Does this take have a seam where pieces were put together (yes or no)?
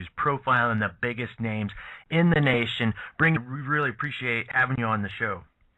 no